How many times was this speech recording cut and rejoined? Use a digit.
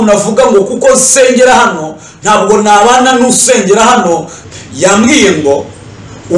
1